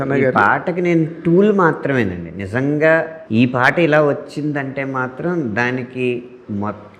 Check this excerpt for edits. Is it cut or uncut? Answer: cut